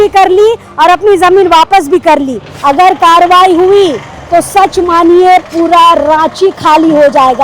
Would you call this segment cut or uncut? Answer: cut